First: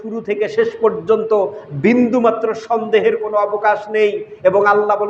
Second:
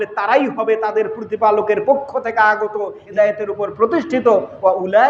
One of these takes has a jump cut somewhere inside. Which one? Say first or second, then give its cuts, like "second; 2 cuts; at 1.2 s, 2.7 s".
second; 1 cut; at 3.0 s